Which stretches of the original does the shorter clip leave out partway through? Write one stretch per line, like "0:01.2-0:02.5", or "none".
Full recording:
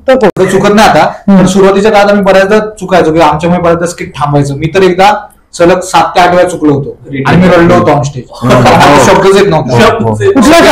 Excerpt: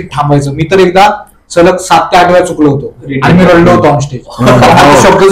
none